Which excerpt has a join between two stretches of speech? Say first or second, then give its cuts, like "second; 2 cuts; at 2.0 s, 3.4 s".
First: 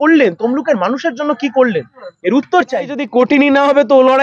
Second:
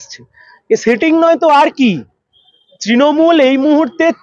first; 1 cut; at 3.0 s